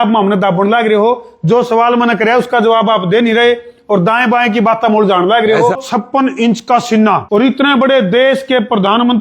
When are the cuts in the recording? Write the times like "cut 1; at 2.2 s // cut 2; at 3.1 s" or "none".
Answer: cut 1; at 5.8 s // cut 2; at 7.2 s